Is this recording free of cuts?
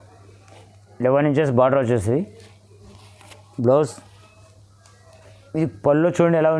yes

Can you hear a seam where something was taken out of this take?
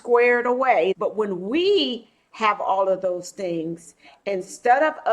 yes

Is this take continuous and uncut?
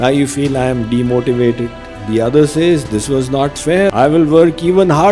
no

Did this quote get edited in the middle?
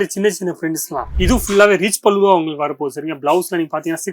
yes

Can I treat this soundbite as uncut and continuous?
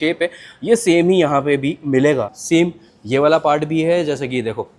no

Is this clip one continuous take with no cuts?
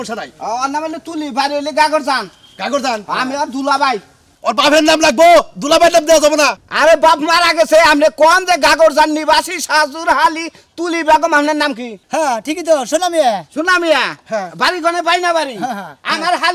yes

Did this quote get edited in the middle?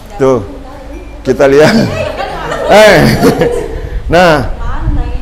no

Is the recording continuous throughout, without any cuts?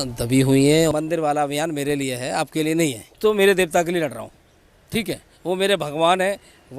no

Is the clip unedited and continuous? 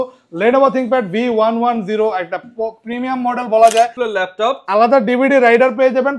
no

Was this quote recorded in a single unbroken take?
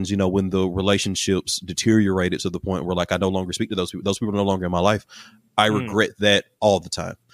yes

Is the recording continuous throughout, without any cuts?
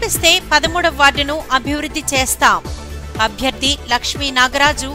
yes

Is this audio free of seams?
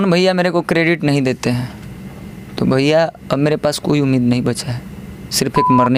yes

